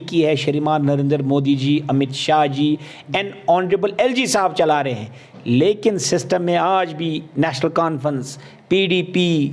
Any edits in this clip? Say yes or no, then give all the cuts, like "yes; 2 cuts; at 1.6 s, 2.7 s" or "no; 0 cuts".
no; 0 cuts